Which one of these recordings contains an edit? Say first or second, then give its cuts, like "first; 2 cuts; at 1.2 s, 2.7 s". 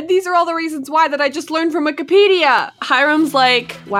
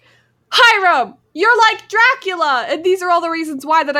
first; 1 cut; at 2.8 s